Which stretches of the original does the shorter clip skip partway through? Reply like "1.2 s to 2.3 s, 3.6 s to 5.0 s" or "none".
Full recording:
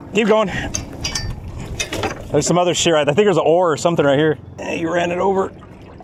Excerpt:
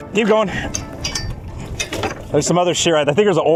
none